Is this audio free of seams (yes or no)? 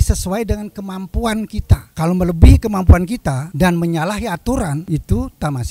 no